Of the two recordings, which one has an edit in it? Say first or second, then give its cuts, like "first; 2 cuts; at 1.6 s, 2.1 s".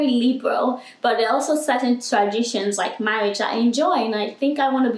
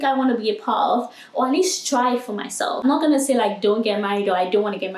second; 1 cut; at 2.8 s